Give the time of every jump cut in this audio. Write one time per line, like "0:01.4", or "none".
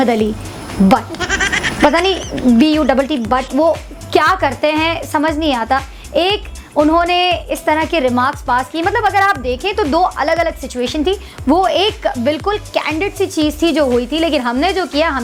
none